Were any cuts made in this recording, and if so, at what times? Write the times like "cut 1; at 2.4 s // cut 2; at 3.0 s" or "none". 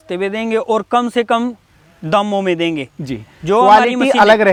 none

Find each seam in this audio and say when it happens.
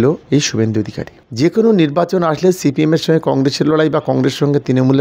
cut 1; at 1.2 s

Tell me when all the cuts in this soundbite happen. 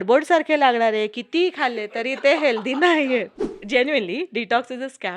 cut 1; at 3.6 s

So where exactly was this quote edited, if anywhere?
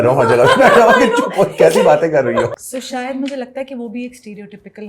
cut 1; at 2.5 s

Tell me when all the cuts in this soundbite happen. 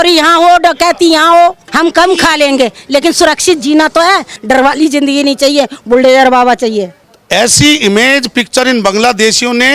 cut 1; at 1.7 s // cut 2; at 4.3 s // cut 3; at 7.0 s

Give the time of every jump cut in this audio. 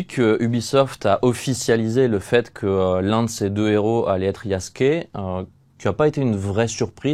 none

